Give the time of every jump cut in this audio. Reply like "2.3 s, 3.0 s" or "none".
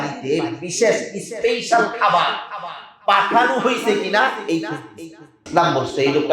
5.4 s